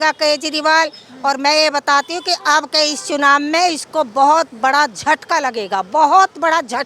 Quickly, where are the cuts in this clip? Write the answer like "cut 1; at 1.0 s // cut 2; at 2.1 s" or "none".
none

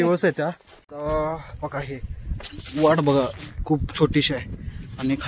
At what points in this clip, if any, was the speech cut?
cut 1; at 0.9 s

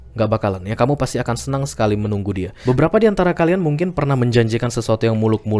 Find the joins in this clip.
cut 1; at 2.5 s

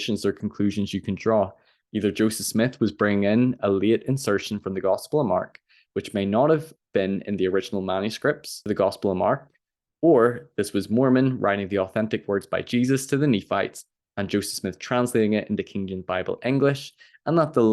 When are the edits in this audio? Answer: cut 1; at 8.5 s

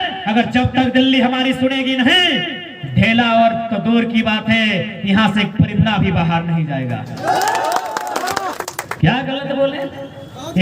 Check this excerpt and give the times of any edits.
cut 1; at 8.6 s

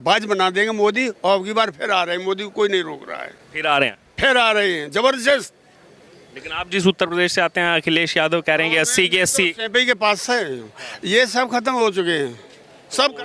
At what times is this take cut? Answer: none

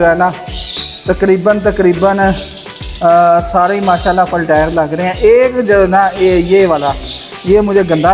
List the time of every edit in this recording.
none

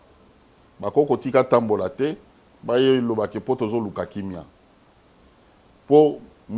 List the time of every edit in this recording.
none

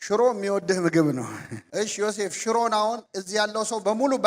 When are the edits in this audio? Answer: cut 1; at 1.6 s

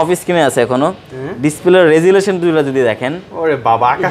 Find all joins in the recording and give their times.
none

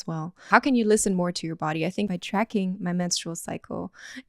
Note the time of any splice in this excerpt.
cut 1; at 2.1 s

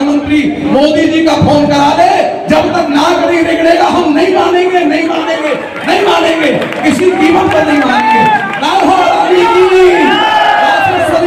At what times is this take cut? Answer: none

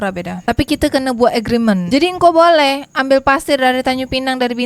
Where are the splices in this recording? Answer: cut 1; at 1.8 s

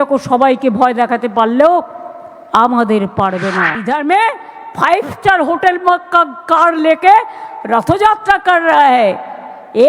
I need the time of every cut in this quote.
cut 1; at 3.7 s

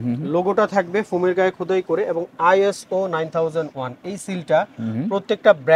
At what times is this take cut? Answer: none

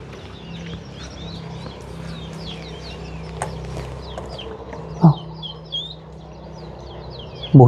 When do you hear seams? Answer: none

